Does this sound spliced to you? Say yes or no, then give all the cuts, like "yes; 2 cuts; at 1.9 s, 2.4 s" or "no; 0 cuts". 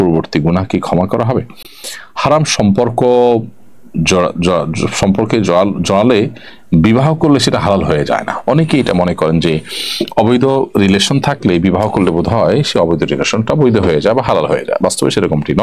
no; 0 cuts